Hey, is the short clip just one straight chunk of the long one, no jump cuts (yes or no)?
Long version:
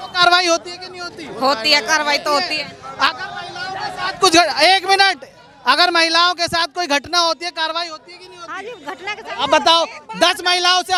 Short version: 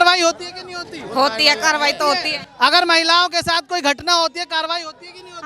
no